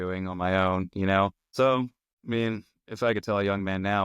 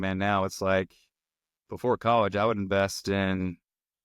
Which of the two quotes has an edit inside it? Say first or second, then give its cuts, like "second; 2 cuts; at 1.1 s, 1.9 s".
first; 2 cuts; at 1.4 s, 2.1 s